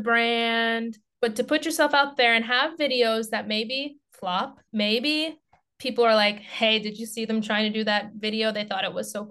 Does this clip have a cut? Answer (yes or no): yes